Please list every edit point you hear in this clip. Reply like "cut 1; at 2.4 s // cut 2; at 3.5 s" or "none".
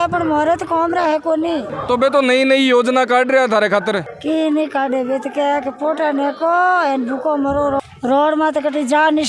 none